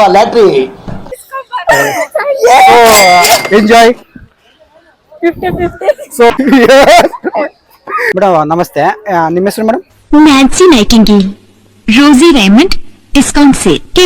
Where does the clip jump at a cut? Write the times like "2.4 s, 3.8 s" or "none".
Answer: 6.4 s, 8.1 s